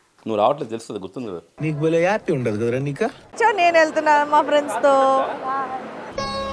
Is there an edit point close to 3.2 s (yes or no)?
yes